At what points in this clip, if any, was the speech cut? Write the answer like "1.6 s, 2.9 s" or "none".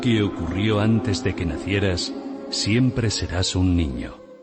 none